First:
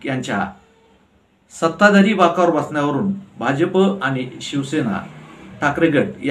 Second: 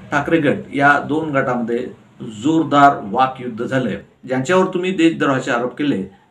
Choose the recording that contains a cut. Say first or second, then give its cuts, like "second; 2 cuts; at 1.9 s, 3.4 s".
second; 1 cut; at 4.2 s